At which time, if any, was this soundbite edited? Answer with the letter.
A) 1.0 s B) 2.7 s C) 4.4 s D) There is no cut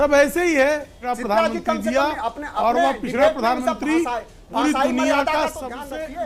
A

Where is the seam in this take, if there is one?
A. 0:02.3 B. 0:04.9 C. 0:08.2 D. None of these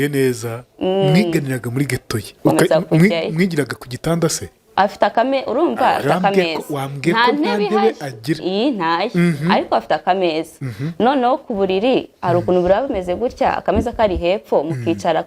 A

